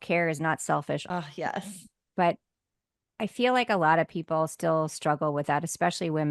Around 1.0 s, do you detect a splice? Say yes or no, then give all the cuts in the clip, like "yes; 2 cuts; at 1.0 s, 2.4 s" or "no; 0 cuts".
yes; 1 cut; at 1.0 s